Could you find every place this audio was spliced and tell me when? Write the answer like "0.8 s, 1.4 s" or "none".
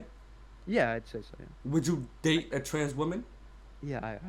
1.6 s